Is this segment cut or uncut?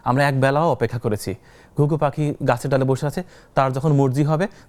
uncut